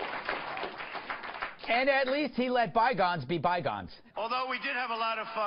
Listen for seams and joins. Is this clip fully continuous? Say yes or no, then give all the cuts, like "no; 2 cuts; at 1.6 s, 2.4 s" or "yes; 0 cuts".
no; 1 cut; at 2.8 s